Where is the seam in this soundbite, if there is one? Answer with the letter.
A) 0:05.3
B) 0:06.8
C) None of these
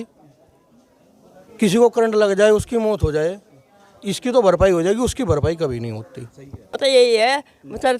B